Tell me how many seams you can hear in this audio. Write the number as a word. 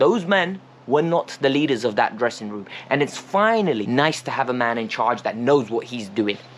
one